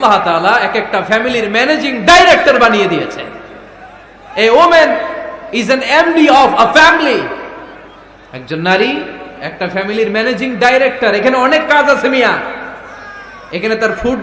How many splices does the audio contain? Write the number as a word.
zero